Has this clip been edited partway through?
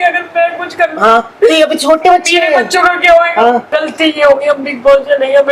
yes; 1 cut; at 3.7 s

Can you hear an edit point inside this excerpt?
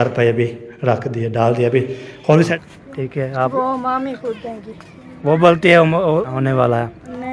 yes; 2 cuts; at 2.5 s, 6.4 s

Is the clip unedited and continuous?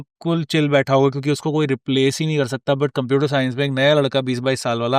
yes; 0 cuts

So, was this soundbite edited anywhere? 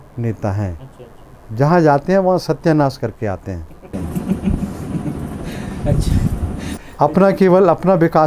no; 0 cuts

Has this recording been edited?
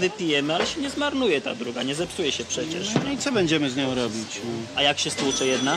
yes; 1 cut; at 1.8 s

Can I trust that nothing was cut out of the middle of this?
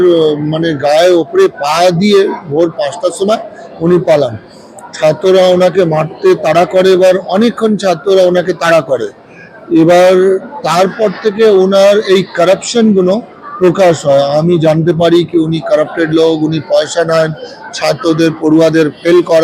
yes; 0 cuts

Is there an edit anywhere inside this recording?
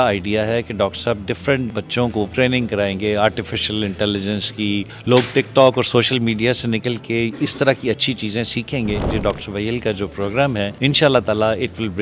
yes; 4 cuts; at 2.1 s, 4.9 s, 9.1 s, 10.7 s

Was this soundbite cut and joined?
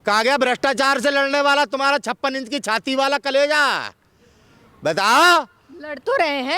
no; 0 cuts

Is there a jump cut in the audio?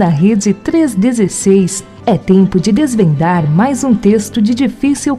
yes; 1 cut; at 1.9 s

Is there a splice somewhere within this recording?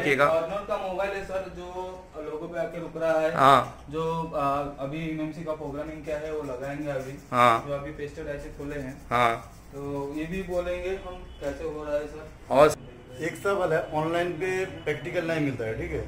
yes; 1 cut; at 12.7 s

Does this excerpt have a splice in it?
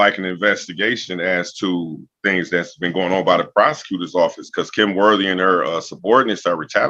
no; 0 cuts

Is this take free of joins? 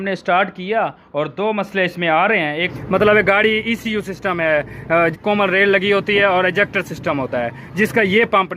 no; 2 cuts; at 2.7 s, 5.2 s

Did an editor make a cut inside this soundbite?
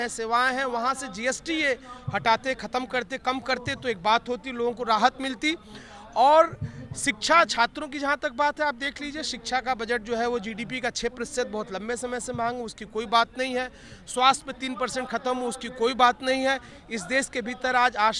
no; 0 cuts

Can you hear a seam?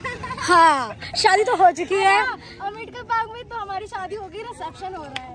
no; 0 cuts

